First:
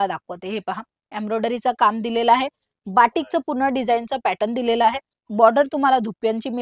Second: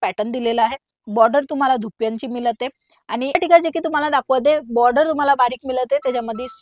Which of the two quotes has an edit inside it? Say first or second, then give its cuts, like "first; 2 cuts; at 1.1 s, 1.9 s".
second; 1 cut; at 3.3 s